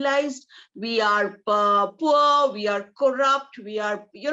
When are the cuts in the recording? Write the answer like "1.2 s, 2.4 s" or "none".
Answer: none